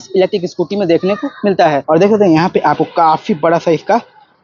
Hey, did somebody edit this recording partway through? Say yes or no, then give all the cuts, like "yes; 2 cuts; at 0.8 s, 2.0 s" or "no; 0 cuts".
yes; 1 cut; at 1.8 s